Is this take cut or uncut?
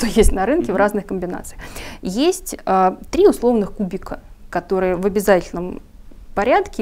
uncut